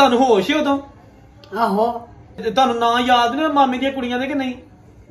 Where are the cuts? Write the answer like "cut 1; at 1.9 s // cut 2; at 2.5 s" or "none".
cut 1; at 2.4 s